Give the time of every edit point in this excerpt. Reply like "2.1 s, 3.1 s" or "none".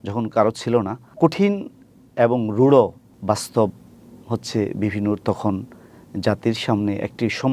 1.0 s, 3.1 s